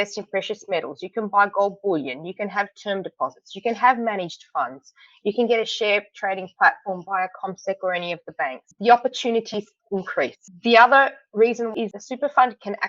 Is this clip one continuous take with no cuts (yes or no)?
no